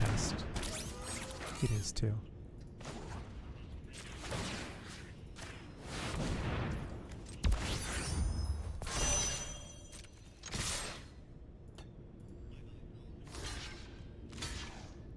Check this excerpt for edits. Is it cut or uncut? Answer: uncut